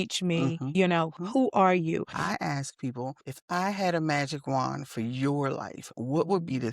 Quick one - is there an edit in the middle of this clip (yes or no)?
yes